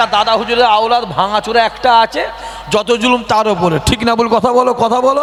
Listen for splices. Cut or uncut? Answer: uncut